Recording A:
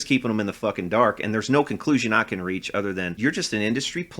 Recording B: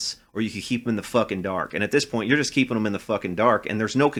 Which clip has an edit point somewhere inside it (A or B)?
A